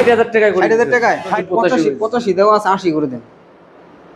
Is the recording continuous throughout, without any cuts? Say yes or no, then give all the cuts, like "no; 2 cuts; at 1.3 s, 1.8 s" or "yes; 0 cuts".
no; 1 cut; at 1.4 s